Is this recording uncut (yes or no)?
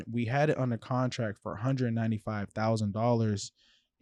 yes